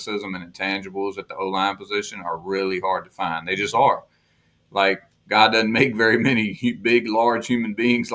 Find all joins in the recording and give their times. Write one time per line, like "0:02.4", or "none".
none